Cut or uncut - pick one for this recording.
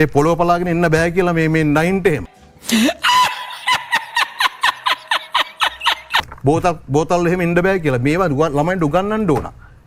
uncut